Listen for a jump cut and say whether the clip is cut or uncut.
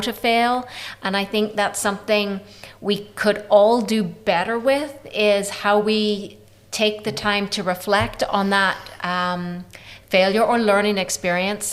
uncut